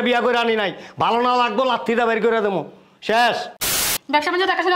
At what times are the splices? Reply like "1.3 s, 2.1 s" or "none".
3.6 s